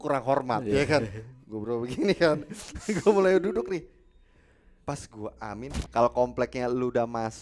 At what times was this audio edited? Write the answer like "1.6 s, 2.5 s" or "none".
5.8 s